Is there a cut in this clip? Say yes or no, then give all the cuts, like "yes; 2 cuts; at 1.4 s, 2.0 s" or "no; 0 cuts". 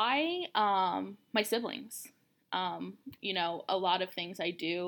no; 0 cuts